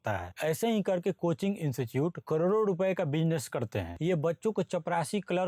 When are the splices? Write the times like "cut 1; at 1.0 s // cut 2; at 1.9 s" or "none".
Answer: cut 1; at 3.9 s